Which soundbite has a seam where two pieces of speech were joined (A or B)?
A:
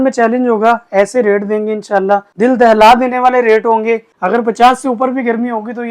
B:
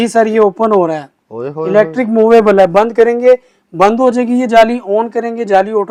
A